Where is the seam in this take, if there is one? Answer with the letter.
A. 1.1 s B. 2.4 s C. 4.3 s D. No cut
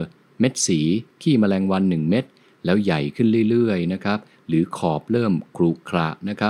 A